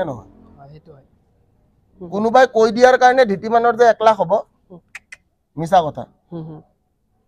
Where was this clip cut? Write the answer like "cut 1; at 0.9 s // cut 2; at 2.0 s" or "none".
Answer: none